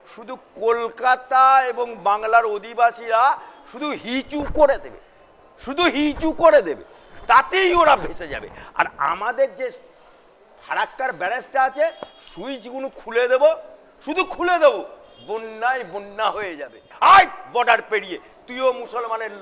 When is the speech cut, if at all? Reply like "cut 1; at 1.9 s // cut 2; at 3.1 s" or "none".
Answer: cut 1; at 16.9 s